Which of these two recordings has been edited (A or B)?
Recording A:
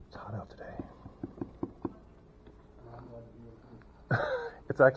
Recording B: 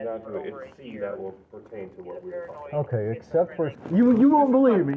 B